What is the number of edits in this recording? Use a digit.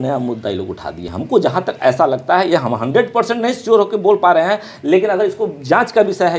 0